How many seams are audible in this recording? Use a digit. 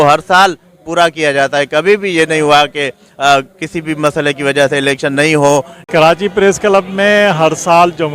1